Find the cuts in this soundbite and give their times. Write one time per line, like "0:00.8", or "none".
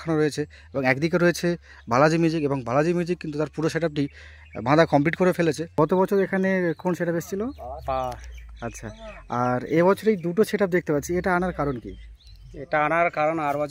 0:05.6